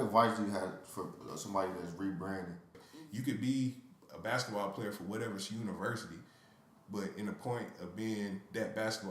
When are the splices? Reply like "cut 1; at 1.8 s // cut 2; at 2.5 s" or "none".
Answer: cut 1; at 2.8 s